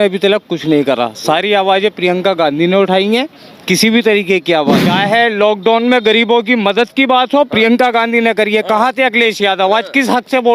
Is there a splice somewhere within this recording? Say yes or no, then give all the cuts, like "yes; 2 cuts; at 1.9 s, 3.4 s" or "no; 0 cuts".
yes; 1 cut; at 4.8 s